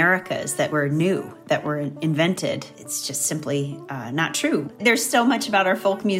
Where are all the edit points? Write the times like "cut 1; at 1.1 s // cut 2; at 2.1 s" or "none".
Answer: cut 1; at 2.7 s // cut 2; at 4.7 s